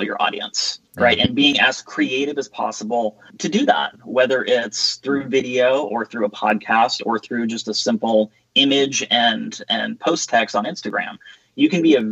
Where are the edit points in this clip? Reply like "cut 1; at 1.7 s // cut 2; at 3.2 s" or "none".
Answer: cut 1; at 3.3 s